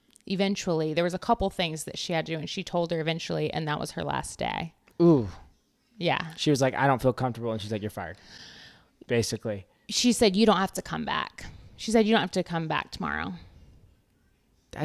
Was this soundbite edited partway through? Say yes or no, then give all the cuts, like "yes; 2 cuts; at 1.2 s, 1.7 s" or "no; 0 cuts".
no; 0 cuts